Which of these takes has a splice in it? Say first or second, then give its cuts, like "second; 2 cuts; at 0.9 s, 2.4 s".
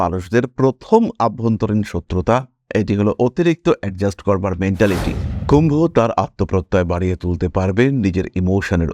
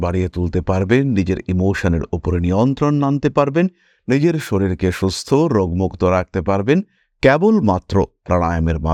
first; 1 cut; at 5.3 s